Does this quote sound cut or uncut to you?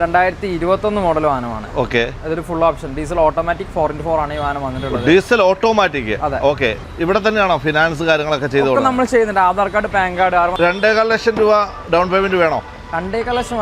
cut